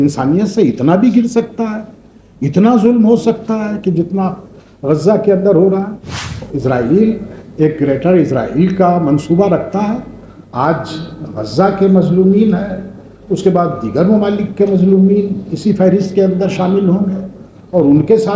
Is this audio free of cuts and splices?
no; 1 cut; at 6.4 s

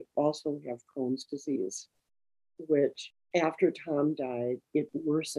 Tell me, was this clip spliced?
yes; 1 cut; at 3.1 s

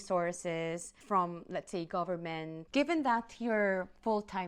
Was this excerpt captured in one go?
no; 1 cut; at 2.7 s

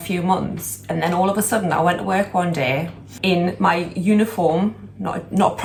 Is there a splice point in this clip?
no; 0 cuts

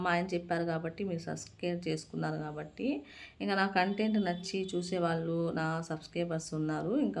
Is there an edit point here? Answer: no; 0 cuts

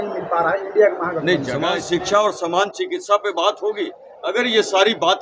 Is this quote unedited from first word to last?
no; 1 cut; at 1.7 s

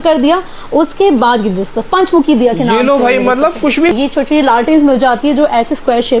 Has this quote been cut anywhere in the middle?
yes; 1 cut; at 3.9 s

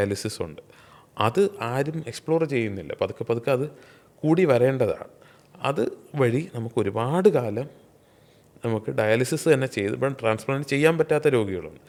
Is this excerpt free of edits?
yes; 0 cuts

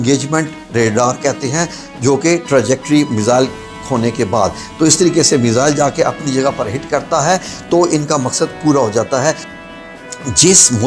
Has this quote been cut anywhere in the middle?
no; 0 cuts

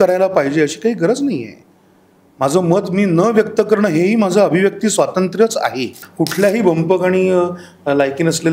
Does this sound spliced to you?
yes; 1 cut; at 6.0 s

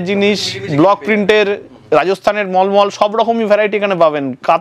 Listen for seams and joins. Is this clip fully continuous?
yes; 0 cuts

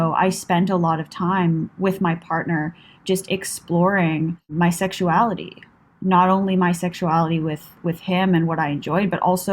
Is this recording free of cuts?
no; 2 cuts; at 1.7 s, 4.5 s

